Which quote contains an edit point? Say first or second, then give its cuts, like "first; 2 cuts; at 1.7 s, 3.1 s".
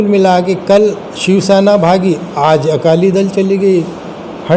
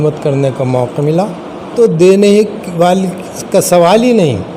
second; 1 cut; at 1.7 s